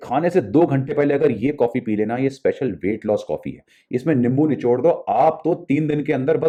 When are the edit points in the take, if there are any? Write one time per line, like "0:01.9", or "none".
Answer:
none